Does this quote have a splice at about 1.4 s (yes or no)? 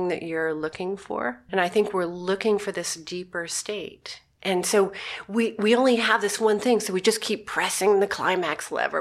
yes